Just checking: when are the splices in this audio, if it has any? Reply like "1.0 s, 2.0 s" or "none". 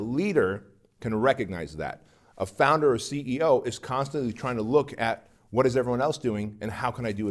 none